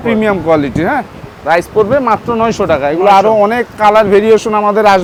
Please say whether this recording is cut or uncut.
uncut